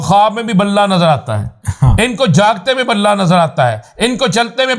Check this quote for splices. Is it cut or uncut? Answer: uncut